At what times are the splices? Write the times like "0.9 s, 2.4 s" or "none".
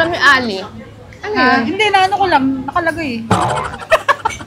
none